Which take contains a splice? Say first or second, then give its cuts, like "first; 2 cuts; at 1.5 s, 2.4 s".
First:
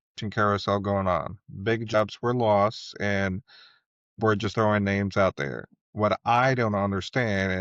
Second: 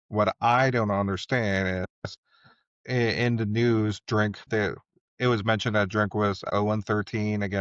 second; 3 cuts; at 2.8 s, 4.4 s, 6.4 s